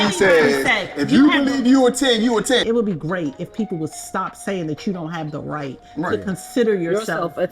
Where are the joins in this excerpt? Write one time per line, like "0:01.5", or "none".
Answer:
0:02.6

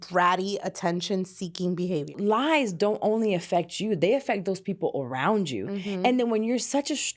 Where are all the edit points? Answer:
0:02.1

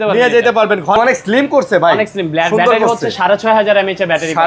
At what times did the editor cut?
0:01.0

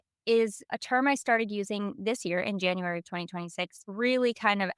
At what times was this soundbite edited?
0:03.8

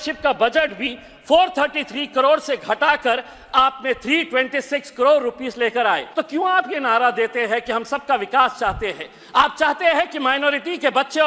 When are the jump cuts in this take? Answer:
0:06.1

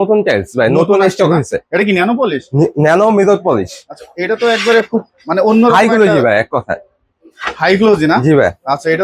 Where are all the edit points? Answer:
none

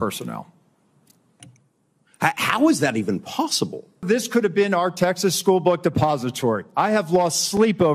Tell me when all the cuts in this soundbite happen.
0:04.0

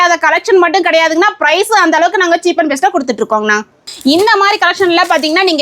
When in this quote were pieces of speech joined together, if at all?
0:03.9

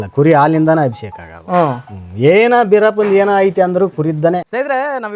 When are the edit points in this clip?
none

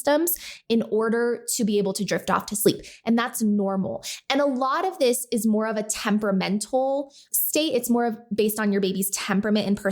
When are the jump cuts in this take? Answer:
0:07.3

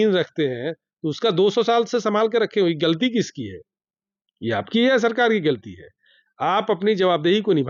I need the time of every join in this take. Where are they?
none

